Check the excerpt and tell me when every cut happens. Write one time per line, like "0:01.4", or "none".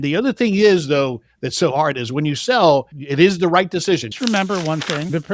0:03.0
0:04.1